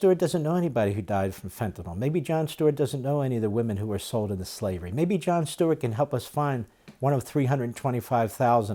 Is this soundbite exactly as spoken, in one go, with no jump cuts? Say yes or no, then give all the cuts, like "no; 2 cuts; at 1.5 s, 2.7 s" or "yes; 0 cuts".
yes; 0 cuts